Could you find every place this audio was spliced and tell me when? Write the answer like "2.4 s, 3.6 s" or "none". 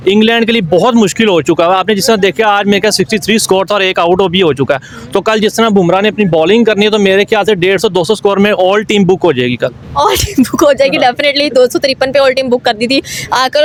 none